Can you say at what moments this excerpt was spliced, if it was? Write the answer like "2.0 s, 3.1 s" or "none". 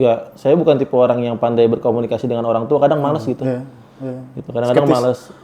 none